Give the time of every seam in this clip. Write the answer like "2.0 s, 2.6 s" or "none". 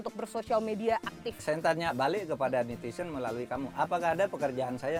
none